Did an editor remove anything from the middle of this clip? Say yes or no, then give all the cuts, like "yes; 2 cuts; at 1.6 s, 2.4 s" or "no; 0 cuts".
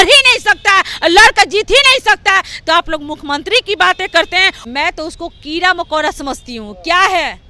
yes; 1 cut; at 4.6 s